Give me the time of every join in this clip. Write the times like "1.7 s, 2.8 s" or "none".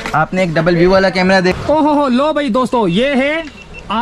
1.5 s